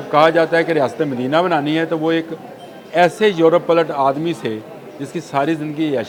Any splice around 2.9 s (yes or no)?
no